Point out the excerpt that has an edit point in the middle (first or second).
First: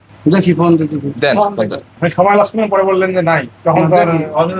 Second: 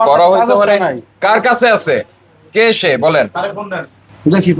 first